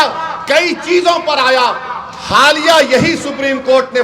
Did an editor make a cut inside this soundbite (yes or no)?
no